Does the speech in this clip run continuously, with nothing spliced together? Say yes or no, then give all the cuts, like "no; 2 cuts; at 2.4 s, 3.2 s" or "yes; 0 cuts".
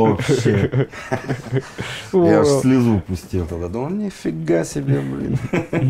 yes; 0 cuts